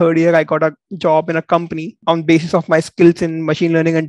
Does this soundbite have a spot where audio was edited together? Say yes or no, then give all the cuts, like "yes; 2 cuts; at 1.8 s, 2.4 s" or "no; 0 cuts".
no; 0 cuts